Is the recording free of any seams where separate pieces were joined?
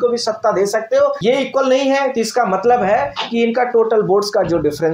no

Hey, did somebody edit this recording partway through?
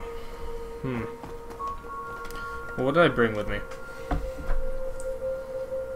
yes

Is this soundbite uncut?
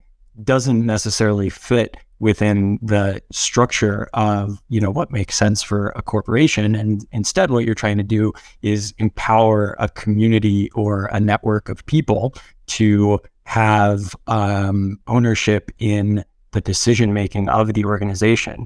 yes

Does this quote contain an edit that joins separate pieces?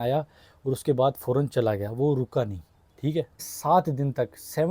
yes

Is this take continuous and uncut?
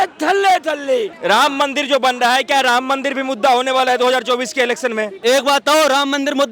no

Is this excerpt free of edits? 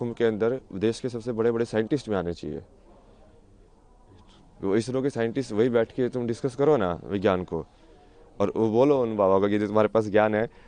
yes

